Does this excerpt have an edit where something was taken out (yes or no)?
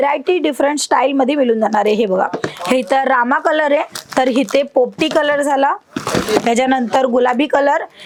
no